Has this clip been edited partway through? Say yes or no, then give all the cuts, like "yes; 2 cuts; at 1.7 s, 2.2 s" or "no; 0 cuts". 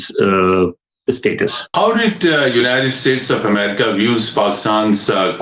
yes; 1 cut; at 1.7 s